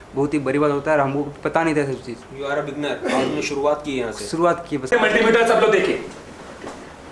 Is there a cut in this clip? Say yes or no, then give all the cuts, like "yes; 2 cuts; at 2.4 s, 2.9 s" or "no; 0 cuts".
yes; 1 cut; at 4.8 s